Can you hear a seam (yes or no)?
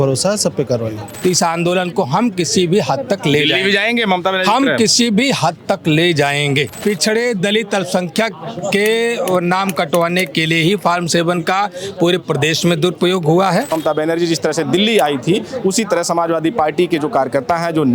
yes